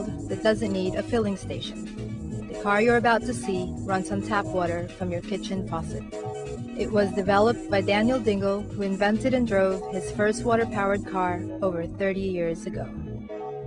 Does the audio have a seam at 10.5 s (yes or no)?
no